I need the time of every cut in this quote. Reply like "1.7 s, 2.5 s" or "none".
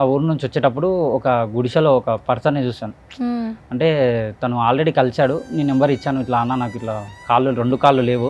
none